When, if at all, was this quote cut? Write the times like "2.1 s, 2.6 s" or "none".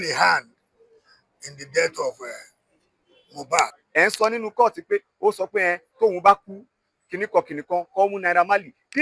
3.8 s